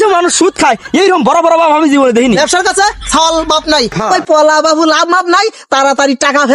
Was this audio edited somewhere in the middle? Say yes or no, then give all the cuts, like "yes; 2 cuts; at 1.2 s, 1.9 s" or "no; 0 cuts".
yes; 2 cuts; at 2.4 s, 3.9 s